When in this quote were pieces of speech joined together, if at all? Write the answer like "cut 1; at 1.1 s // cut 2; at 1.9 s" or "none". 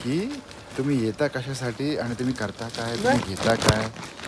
none

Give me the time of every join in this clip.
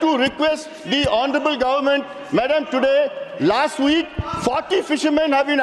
none

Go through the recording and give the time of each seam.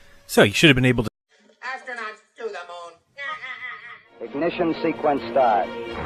none

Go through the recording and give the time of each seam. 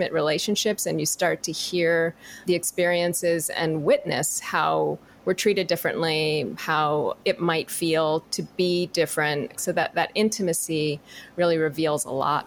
cut 1; at 2.4 s // cut 2; at 7.2 s // cut 3; at 8.3 s // cut 4; at 9.6 s

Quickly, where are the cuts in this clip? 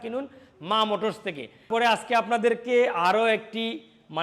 cut 1; at 1.5 s

